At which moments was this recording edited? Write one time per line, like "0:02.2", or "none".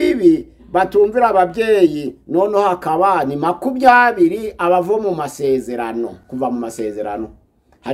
none

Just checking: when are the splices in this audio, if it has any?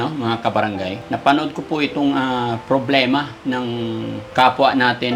0:01.0
0:04.2

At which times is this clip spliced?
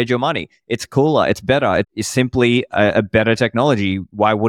0:01.9

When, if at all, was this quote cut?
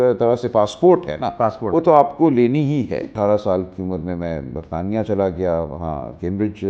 0:03.1

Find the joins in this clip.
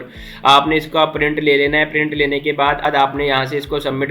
0:02.8

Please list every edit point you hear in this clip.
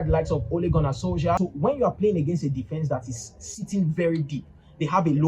0:01.4

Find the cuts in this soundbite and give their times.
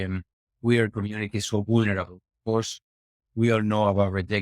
none

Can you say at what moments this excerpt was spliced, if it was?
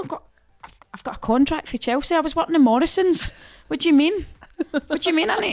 none

